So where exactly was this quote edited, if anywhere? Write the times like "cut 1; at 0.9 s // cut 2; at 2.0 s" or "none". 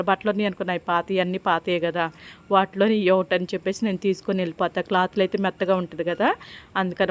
none